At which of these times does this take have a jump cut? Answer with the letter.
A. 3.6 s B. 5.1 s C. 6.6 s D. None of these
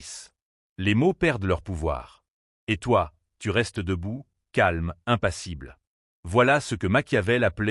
C